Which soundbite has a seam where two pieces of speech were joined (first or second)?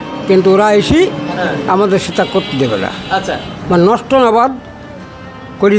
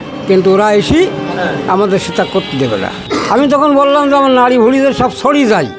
second